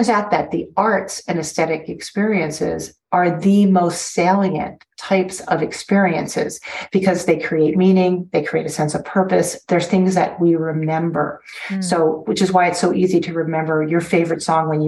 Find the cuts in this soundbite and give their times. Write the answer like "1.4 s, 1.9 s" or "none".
none

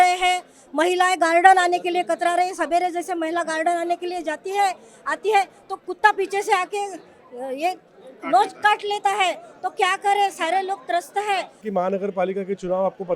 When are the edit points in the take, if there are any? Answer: 11.6 s

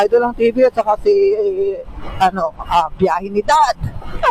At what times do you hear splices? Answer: none

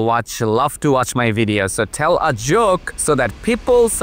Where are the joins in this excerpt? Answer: 2.9 s

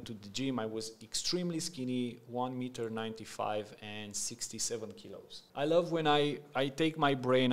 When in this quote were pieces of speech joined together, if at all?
5.4 s

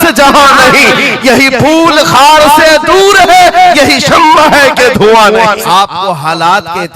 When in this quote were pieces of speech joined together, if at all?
5.6 s

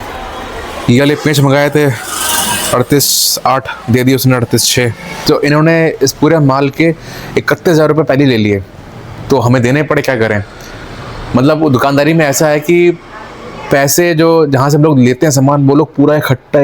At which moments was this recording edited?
5.1 s

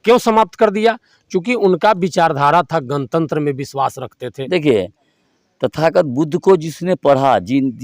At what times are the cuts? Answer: 4.3 s

